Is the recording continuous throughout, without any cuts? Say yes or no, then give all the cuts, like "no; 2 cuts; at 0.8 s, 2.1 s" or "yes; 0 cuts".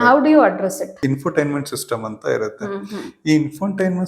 no; 1 cut; at 0.9 s